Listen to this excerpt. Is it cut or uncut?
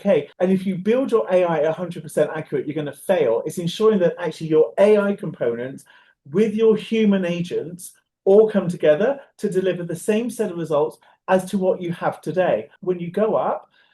cut